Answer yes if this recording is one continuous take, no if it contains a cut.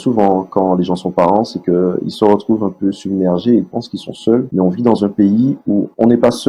yes